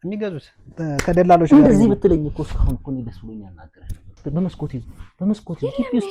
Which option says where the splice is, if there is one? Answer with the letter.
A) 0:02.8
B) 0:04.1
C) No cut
B